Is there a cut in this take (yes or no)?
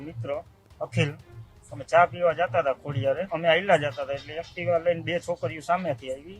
yes